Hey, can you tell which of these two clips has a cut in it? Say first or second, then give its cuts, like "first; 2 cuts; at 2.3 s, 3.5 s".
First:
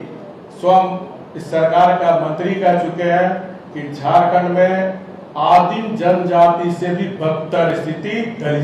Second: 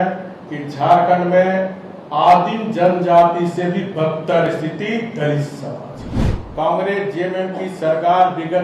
second; 1 cut; at 6.4 s